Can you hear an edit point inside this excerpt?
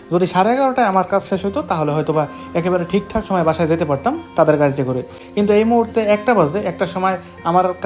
no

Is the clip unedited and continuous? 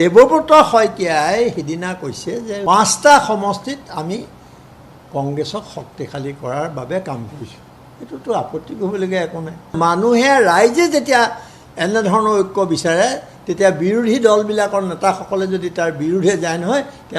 no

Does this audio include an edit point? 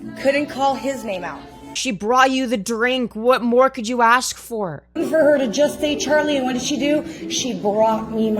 yes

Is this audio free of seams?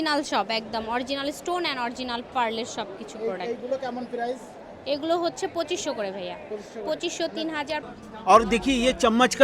no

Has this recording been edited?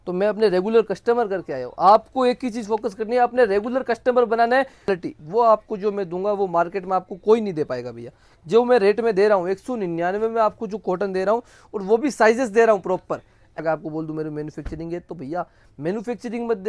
yes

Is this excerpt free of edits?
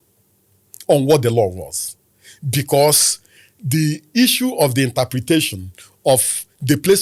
yes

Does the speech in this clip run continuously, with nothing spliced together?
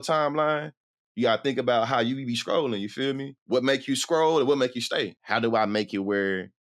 no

